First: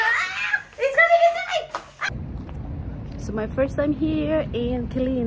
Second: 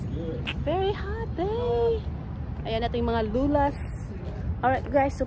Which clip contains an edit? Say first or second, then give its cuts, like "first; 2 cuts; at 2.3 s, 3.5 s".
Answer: first; 1 cut; at 2.4 s